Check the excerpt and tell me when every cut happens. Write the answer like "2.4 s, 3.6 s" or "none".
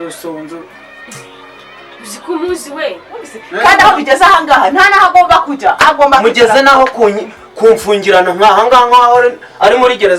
3.4 s